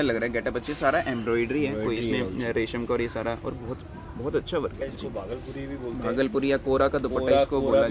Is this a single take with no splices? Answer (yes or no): no